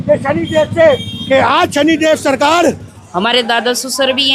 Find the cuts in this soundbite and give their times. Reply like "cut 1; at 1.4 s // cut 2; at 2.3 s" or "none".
cut 1; at 2.9 s